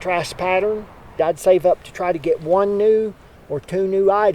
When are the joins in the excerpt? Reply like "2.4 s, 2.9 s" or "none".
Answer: 1.1 s